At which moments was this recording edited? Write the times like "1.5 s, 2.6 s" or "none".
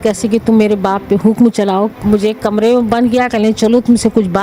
1.9 s